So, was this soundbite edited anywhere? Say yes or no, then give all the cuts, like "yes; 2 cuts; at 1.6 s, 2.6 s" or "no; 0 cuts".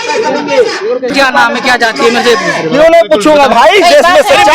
yes; 1 cut; at 1.1 s